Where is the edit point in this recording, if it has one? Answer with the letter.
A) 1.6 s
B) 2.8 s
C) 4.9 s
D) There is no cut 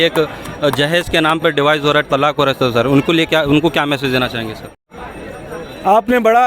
C